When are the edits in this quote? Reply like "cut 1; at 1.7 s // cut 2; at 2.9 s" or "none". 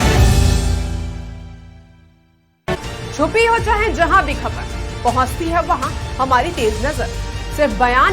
cut 1; at 2.7 s